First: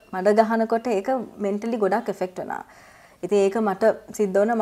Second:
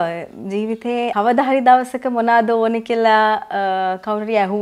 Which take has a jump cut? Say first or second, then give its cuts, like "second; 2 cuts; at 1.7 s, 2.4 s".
second; 1 cut; at 1.1 s